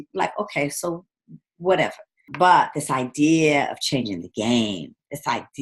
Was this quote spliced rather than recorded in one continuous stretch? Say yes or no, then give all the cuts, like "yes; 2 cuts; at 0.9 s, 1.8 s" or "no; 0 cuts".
yes; 1 cut; at 2.3 s